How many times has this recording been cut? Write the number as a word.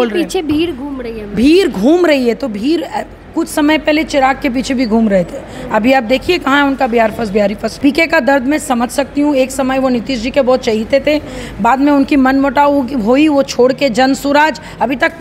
one